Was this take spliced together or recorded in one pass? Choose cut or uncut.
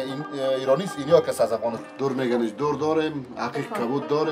cut